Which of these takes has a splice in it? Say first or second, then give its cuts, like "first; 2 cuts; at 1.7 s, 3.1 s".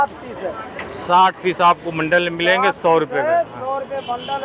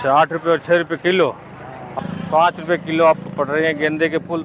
second; 1 cut; at 2.0 s